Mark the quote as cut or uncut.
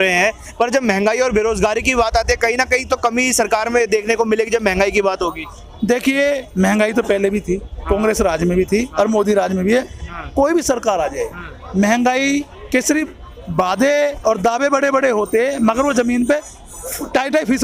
uncut